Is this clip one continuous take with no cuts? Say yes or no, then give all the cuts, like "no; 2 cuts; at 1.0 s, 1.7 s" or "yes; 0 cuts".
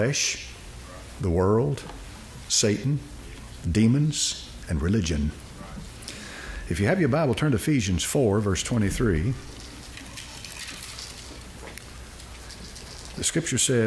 no; 1 cut; at 10.5 s